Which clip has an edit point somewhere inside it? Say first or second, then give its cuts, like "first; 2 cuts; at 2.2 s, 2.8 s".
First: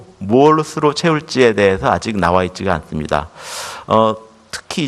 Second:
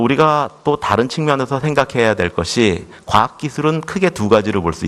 second; 1 cut; at 1.3 s